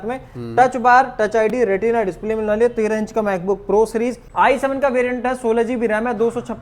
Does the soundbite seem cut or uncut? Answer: cut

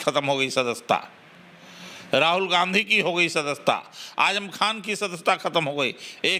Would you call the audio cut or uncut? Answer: uncut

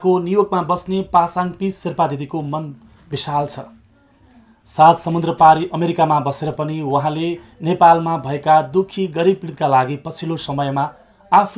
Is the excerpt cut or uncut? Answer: uncut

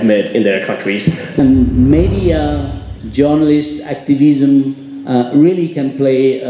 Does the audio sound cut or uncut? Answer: cut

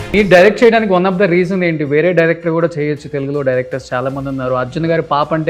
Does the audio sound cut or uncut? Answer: uncut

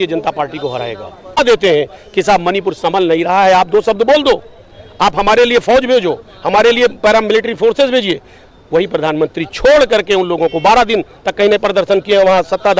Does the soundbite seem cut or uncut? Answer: cut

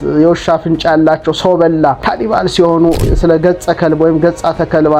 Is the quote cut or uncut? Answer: cut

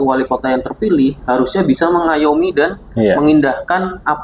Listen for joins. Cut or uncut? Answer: uncut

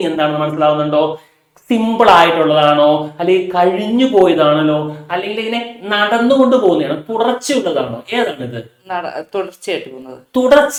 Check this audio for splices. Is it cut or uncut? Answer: uncut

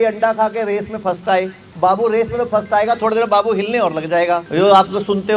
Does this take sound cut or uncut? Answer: cut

